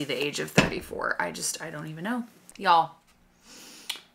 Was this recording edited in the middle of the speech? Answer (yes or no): yes